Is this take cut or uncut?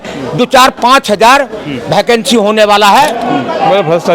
cut